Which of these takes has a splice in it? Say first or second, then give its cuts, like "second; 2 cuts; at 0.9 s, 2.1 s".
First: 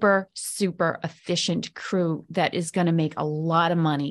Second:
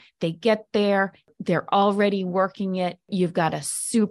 second; 2 cuts; at 1.3 s, 3.1 s